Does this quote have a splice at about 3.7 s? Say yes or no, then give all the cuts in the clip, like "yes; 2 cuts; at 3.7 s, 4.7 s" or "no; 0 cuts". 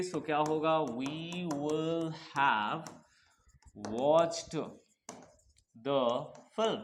no; 0 cuts